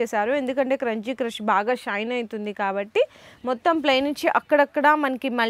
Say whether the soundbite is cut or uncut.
uncut